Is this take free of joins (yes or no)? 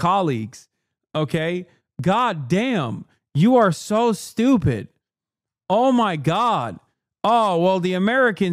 yes